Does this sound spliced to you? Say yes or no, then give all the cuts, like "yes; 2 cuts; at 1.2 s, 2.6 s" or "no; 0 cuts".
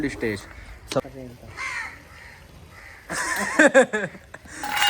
yes; 1 cut; at 1.1 s